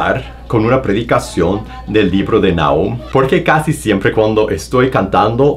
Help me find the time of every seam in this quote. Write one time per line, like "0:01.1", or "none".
0:03.0

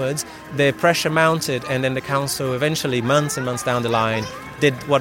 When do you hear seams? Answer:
none

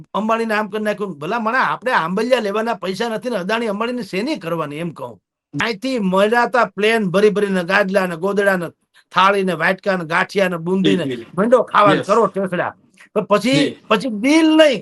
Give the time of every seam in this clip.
0:05.4

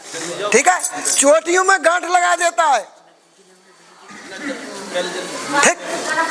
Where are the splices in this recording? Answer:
none

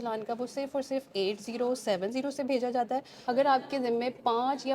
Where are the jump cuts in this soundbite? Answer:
0:03.1

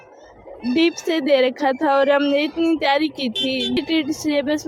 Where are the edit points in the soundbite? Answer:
0:03.7

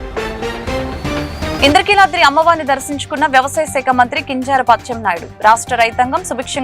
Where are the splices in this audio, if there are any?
0:01.6

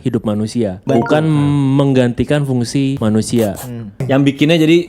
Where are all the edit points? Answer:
0:00.8
0:03.0
0:04.0

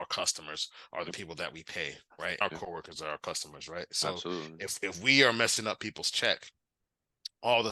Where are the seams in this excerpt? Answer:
0:02.4

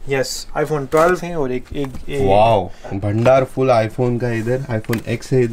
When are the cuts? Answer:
0:01.2
0:03.0

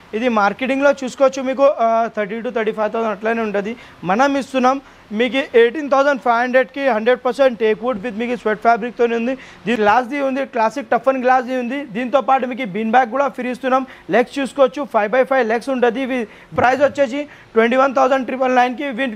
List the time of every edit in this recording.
0:09.8
0:16.5

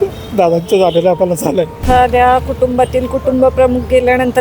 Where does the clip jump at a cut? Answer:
0:01.8

